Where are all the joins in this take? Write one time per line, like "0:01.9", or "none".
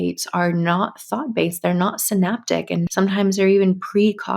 0:02.9